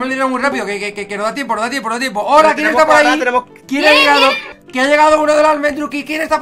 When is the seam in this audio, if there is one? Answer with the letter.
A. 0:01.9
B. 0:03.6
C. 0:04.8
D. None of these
B